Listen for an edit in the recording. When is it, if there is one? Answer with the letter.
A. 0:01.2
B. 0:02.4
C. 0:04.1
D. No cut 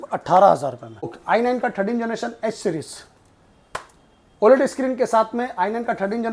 A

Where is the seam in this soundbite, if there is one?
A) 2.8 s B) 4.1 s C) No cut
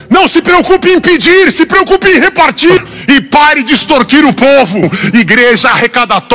A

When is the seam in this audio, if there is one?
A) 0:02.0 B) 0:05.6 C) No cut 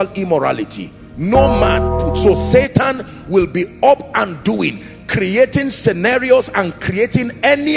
A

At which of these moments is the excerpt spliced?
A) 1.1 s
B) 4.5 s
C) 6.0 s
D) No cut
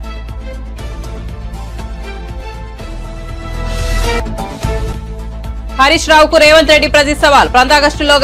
A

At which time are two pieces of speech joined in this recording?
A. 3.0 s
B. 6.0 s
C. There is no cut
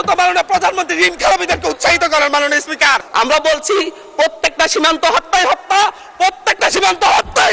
A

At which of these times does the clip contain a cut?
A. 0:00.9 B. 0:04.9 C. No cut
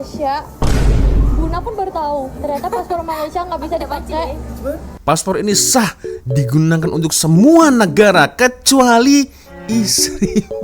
B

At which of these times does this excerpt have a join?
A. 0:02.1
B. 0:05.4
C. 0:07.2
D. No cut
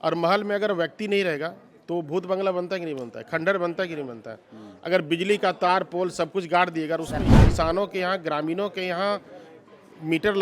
C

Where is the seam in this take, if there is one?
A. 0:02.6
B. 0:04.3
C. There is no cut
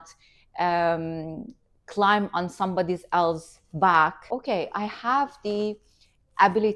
B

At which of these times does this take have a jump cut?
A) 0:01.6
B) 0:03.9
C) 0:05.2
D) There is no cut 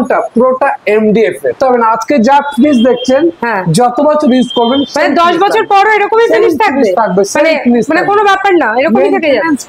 A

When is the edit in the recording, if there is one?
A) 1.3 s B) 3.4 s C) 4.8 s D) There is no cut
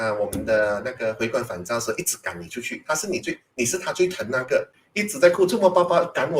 C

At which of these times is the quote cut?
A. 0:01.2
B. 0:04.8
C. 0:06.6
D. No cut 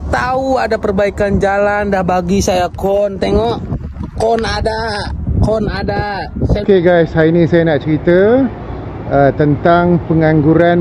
C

